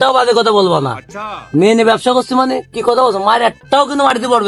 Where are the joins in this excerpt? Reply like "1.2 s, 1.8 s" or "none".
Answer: none